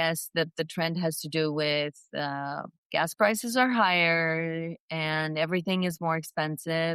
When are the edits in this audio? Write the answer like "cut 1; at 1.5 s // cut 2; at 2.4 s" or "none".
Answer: none